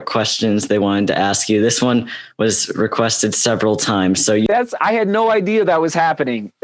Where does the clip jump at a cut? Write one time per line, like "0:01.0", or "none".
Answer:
0:04.5